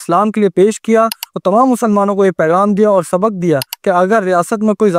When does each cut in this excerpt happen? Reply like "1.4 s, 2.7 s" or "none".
3.7 s